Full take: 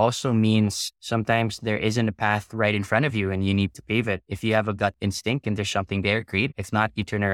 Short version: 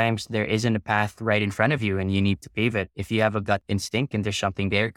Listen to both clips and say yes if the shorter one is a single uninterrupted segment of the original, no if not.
yes